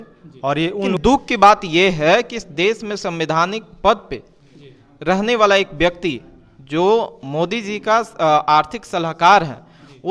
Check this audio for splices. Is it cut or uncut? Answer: cut